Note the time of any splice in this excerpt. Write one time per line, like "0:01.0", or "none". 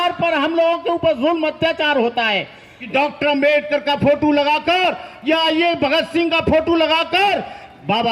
0:02.7